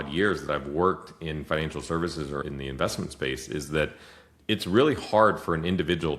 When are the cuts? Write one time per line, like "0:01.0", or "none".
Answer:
0:04.3